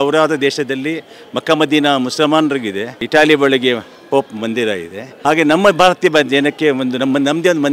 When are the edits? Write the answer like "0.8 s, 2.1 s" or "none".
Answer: none